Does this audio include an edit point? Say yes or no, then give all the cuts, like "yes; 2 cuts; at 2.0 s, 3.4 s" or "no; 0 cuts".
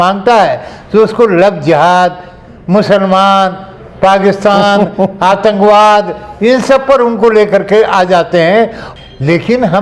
yes; 1 cut; at 8.8 s